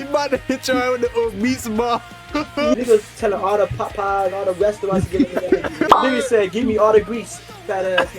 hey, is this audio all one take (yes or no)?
no